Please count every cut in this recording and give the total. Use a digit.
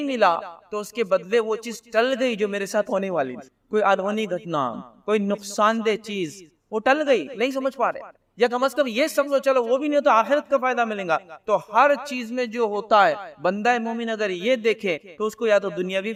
0